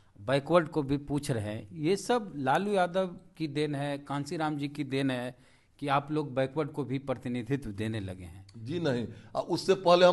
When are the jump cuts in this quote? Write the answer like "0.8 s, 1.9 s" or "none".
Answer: none